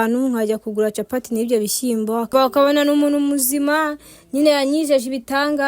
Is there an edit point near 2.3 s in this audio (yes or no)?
yes